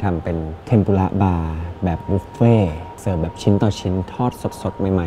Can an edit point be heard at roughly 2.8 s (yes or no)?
no